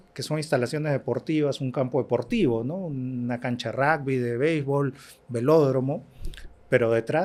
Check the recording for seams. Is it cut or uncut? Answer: uncut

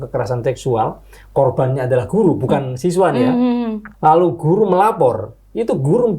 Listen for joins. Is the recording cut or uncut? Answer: cut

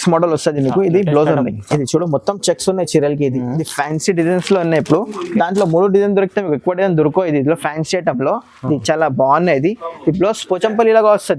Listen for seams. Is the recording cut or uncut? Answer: uncut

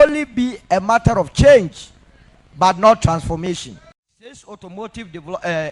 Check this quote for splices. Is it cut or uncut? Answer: cut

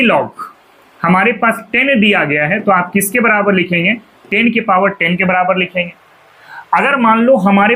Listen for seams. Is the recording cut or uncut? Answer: uncut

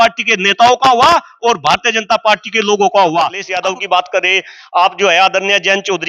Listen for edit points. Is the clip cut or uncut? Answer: cut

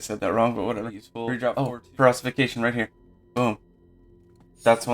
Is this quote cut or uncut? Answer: cut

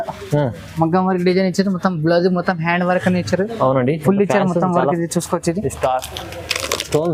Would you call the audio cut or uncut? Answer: uncut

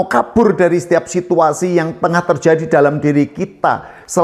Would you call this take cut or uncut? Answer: uncut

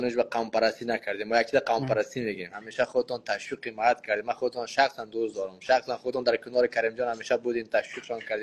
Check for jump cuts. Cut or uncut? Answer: uncut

